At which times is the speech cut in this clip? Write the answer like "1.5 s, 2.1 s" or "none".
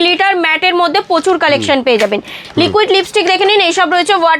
2.4 s